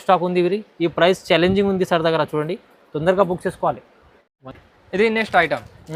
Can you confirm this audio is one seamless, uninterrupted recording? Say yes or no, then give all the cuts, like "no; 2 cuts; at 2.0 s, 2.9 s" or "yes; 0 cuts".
yes; 0 cuts